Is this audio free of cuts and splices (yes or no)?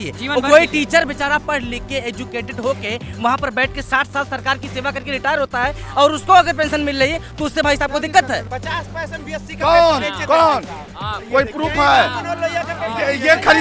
no